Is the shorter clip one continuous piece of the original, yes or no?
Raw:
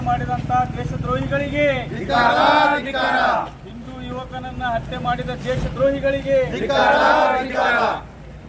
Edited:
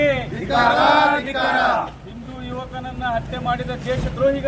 yes